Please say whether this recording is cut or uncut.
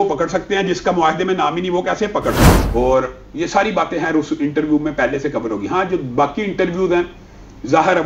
cut